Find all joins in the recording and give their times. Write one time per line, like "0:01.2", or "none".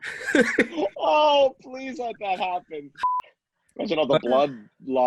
0:03.3